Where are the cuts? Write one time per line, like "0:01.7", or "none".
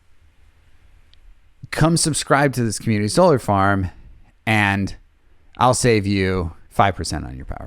0:06.6